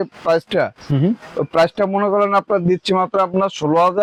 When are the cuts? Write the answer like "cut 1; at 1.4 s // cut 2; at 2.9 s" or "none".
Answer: none